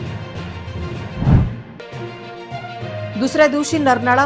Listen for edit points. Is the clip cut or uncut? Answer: cut